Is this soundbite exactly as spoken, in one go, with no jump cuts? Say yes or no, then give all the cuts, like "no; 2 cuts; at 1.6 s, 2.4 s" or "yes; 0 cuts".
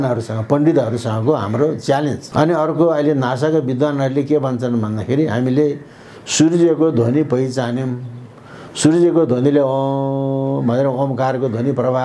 no; 1 cut; at 2.2 s